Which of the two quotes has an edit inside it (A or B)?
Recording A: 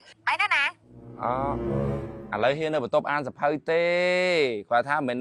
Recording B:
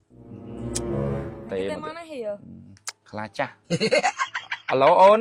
A